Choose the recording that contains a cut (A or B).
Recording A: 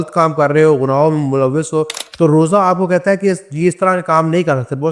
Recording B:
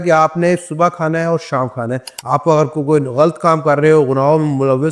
B